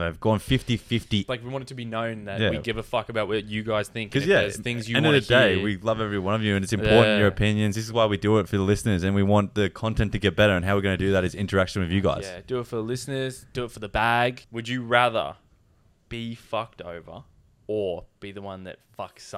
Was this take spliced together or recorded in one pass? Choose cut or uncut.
cut